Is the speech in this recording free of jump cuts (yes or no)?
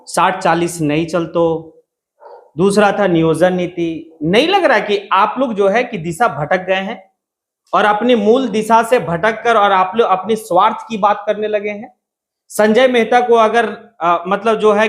yes